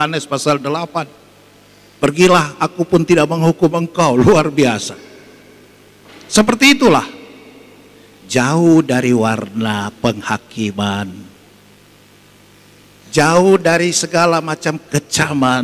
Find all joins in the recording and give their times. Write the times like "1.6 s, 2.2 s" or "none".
none